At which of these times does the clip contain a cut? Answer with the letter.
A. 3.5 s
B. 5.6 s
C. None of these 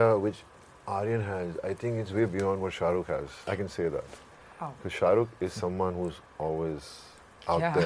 A